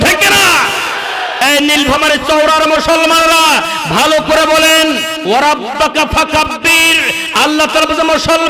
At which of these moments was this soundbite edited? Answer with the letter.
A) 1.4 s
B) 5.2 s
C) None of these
A